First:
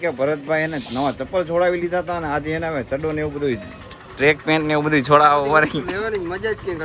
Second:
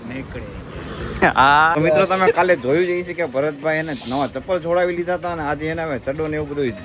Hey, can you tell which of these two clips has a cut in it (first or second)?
second